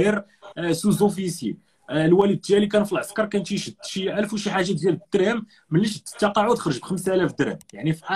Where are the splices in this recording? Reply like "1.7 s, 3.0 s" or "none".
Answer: none